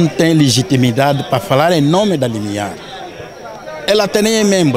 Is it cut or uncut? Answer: uncut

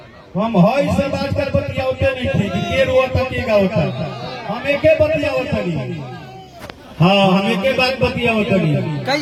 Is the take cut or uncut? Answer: uncut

